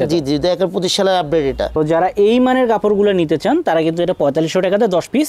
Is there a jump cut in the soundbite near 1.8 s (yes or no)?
yes